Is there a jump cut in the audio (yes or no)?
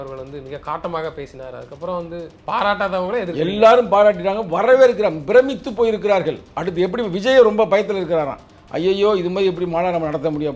yes